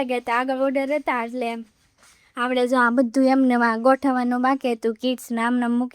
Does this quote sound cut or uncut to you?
uncut